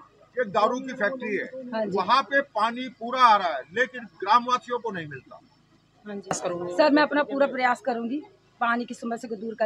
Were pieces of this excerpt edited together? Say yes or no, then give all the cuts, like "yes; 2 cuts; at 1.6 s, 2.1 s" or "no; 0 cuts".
yes; 1 cut; at 6.3 s